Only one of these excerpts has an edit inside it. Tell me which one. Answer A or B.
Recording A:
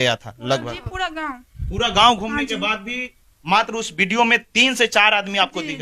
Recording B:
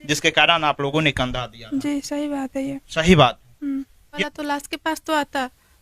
B